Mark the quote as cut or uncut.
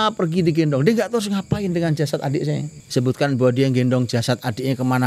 cut